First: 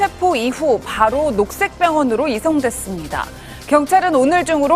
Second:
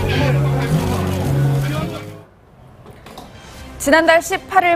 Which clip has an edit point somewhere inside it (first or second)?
first